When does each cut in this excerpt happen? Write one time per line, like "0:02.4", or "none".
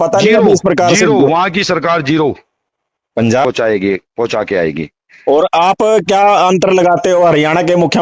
0:03.4